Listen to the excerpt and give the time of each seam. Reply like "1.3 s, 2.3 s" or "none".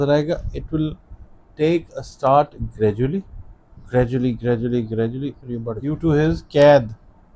5.8 s

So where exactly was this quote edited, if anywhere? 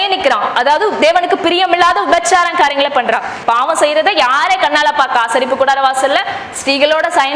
3.3 s

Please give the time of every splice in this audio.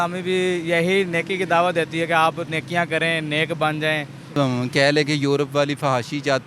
4.4 s

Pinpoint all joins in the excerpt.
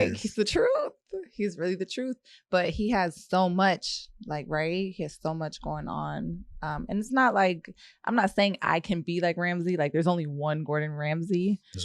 none

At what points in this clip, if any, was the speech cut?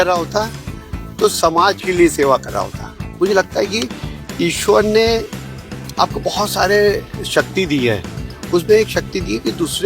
3.1 s

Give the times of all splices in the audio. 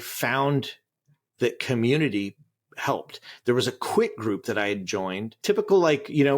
5.3 s

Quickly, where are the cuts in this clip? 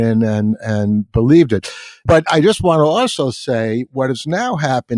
2.0 s

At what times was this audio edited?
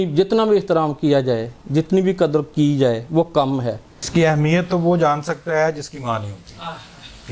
4.0 s

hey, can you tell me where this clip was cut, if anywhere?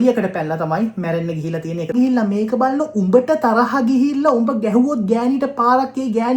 1.9 s

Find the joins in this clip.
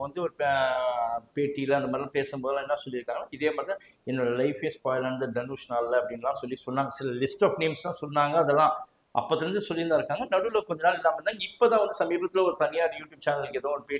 none

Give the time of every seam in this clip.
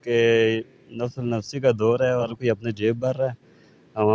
2.3 s

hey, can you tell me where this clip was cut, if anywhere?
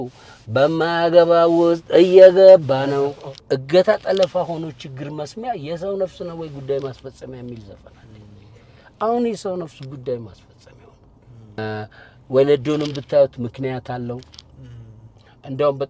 3.3 s, 11.6 s

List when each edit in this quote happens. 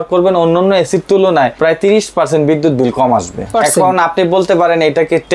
1.5 s, 3.5 s

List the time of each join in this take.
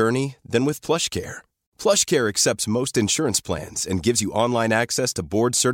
none

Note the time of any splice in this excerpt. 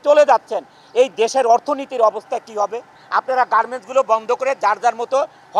3.0 s

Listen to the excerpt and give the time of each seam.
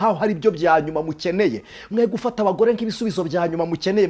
none

